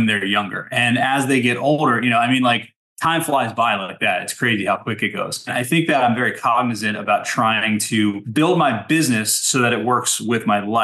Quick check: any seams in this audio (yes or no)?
yes